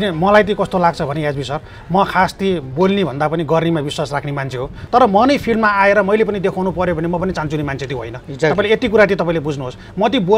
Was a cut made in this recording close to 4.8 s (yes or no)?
yes